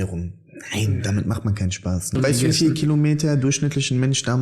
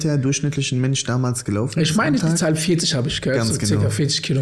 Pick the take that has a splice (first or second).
first